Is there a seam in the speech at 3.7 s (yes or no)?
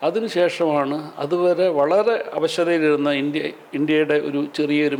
no